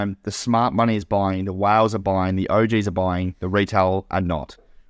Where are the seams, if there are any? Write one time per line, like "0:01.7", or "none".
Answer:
none